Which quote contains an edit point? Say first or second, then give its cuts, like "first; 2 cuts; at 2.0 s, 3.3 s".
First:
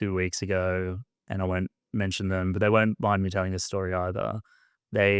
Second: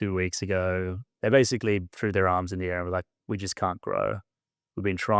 second; 1 cut; at 1.1 s